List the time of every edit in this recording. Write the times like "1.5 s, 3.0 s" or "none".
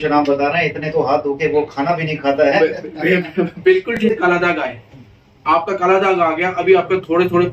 4.0 s

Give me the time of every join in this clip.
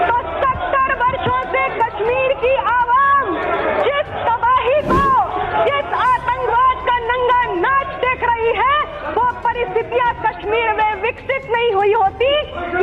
none

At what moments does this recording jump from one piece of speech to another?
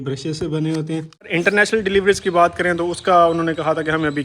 1.3 s

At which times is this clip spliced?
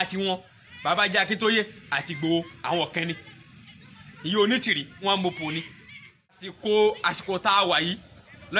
6.6 s

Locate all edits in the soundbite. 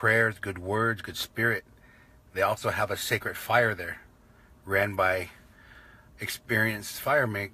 4.9 s

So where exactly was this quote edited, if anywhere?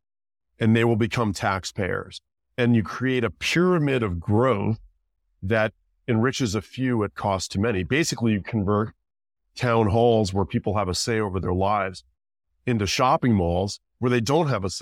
none

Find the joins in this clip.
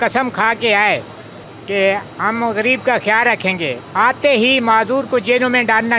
none

